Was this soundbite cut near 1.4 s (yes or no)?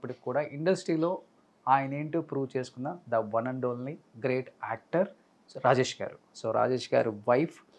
no